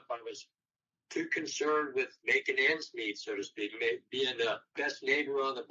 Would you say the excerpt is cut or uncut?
cut